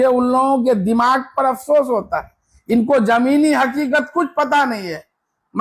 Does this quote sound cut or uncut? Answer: uncut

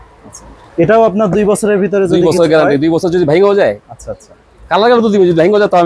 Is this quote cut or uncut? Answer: uncut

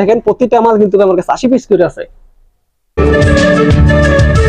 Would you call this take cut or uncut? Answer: cut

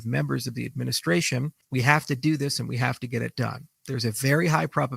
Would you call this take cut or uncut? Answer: cut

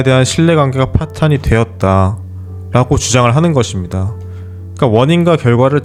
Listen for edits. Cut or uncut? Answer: uncut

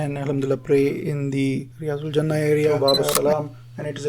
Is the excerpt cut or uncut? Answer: cut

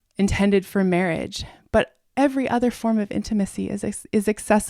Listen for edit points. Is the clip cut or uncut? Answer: cut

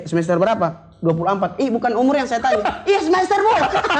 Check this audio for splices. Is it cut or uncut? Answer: uncut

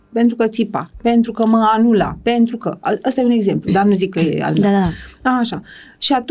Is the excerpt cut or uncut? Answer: uncut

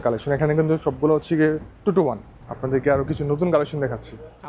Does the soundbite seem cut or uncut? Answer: uncut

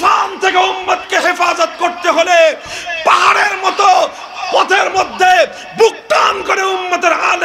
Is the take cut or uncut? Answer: uncut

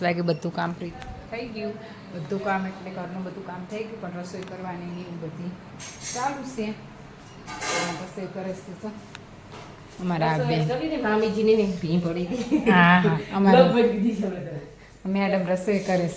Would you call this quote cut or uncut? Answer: uncut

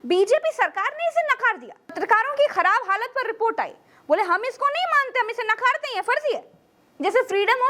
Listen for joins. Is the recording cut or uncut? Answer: cut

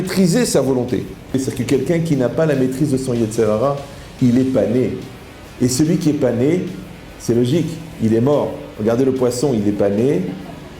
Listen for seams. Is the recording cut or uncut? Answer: cut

